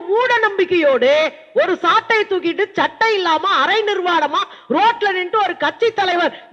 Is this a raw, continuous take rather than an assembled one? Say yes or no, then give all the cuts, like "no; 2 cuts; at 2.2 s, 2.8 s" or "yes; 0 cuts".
yes; 0 cuts